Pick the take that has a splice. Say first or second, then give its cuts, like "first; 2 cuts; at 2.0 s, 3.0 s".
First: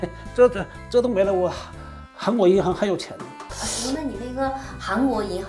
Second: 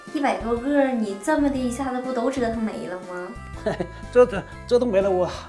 first; 1 cut; at 3.4 s